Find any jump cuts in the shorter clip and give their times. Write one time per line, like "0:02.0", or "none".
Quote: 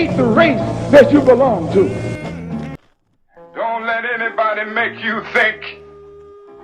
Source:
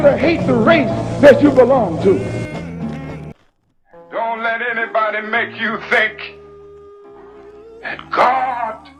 0:02.8